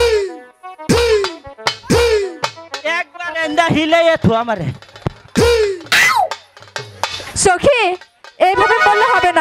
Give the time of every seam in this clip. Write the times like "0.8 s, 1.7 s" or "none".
none